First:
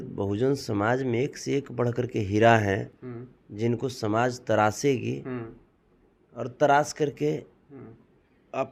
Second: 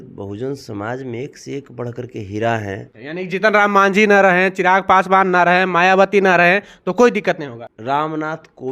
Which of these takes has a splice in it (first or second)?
second